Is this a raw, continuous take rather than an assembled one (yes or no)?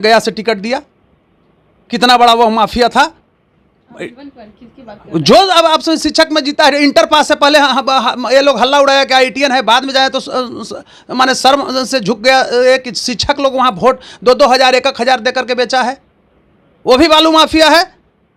yes